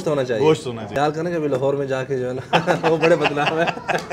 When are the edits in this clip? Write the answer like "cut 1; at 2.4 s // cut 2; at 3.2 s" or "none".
cut 1; at 1.0 s